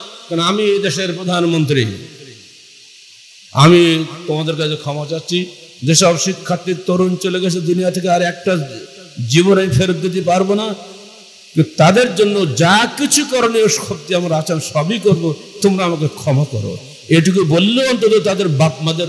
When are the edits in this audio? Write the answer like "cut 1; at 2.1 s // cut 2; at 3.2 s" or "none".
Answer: none